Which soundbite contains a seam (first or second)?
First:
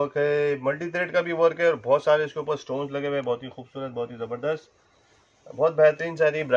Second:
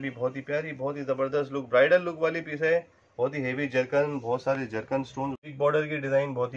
second